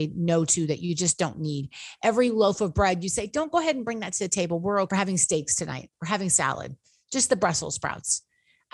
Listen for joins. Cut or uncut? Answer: cut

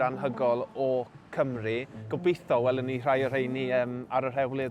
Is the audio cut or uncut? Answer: cut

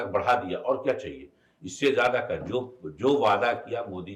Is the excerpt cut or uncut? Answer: uncut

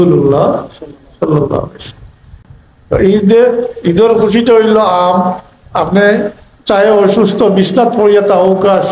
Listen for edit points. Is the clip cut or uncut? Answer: cut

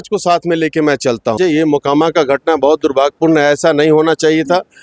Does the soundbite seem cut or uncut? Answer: cut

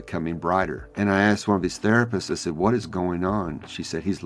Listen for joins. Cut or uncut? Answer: uncut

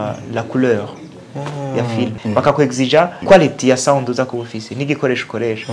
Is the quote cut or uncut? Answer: cut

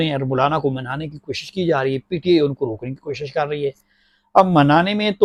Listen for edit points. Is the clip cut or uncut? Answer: uncut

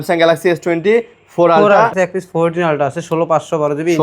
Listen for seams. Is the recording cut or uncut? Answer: cut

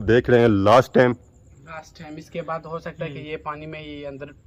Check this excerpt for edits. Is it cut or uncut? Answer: uncut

